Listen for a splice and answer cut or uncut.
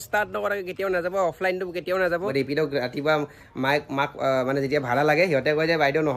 cut